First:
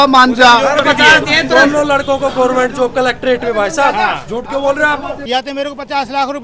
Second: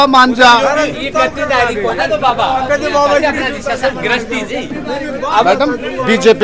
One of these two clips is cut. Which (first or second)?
first